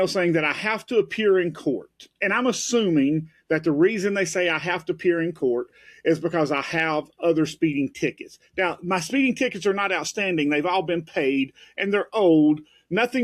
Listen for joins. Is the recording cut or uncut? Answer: uncut